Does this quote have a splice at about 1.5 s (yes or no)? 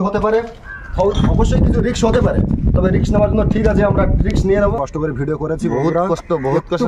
no